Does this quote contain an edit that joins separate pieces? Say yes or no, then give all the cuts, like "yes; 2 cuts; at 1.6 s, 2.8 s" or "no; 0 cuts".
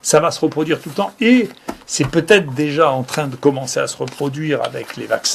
no; 0 cuts